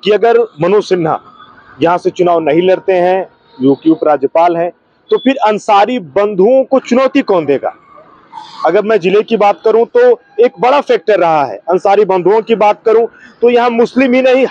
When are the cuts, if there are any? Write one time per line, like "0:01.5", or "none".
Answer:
none